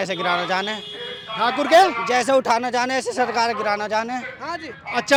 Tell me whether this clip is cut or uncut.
uncut